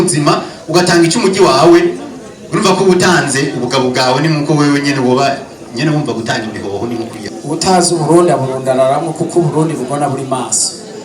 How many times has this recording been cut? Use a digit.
1